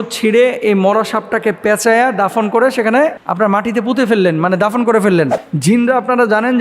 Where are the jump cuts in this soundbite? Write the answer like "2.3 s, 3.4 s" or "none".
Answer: 5.5 s